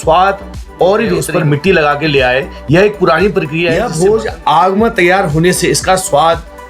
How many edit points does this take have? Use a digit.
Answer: 2